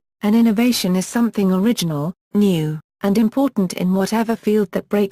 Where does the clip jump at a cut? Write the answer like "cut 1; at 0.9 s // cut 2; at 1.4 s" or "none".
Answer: cut 1; at 2.5 s